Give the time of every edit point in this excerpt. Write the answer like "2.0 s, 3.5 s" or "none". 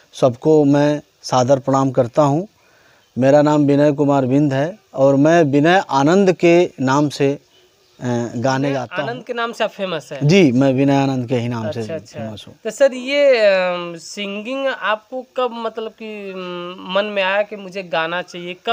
none